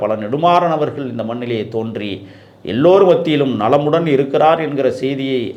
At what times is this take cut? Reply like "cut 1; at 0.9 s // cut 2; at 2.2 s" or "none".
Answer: none